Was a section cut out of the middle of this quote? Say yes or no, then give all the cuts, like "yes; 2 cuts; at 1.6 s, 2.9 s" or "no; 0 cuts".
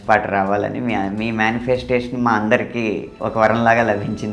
yes; 1 cut; at 3.1 s